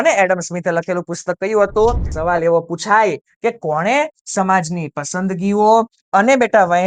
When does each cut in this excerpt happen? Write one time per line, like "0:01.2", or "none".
0:02.1